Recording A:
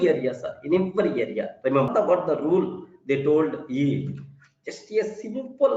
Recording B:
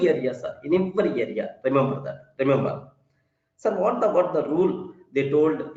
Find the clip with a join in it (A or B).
A